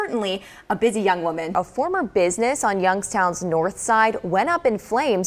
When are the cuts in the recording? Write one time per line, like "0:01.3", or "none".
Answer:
0:01.5

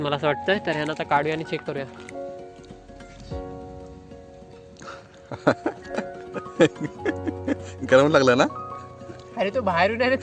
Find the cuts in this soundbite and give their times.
0:02.1

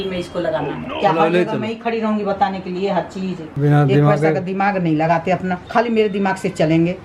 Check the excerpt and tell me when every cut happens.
0:00.9
0:03.6

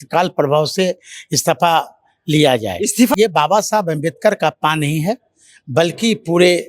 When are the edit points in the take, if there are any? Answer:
0:03.1

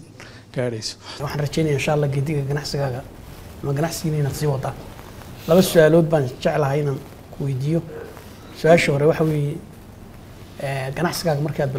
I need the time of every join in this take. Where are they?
0:01.2

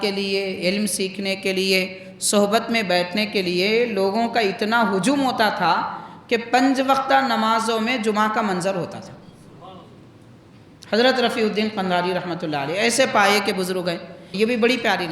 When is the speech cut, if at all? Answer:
0:14.2

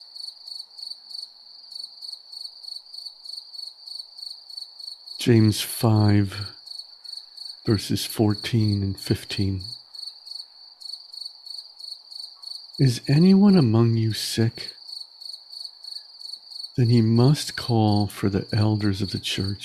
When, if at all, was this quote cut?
none

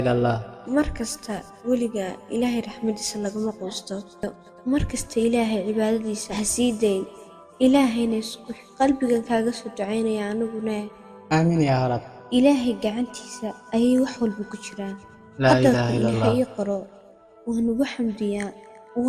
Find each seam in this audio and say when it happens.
0:04.4

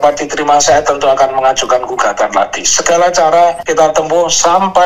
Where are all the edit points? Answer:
0:03.6

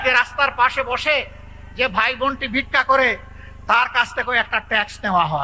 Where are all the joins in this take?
none

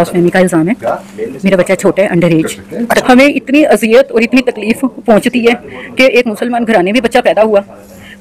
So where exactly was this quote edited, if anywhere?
0:03.0

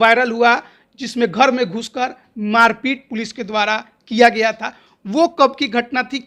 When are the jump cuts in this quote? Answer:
none

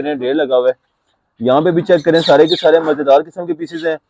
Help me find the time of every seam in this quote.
none

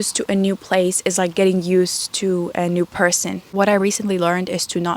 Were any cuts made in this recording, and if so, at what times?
0:03.4

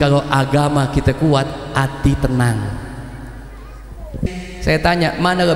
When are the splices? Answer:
0:04.4

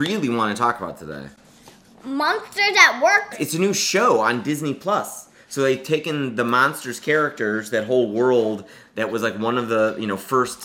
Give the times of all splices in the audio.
0:03.4

